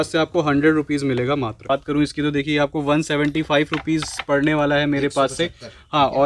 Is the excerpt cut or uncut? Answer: cut